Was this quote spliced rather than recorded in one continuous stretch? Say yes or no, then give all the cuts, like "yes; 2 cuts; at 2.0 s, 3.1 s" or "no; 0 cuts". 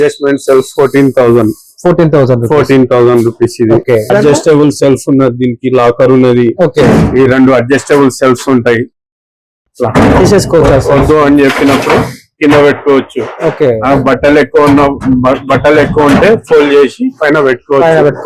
no; 0 cuts